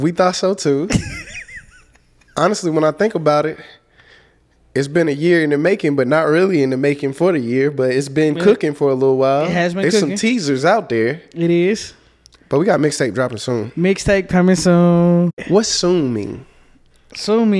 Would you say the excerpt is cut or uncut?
cut